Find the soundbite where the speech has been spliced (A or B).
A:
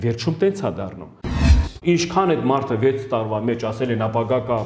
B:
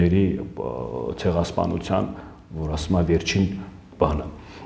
A